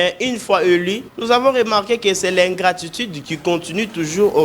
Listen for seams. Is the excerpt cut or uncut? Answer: cut